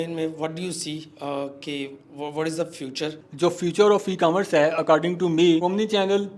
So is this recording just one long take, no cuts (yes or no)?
no